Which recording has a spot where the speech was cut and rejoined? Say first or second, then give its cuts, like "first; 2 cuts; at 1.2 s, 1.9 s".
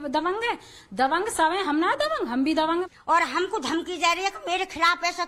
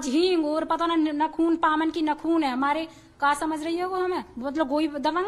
first; 2 cuts; at 1.4 s, 2.8 s